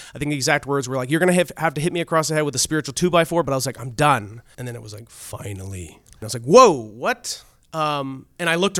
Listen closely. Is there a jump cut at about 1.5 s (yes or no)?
no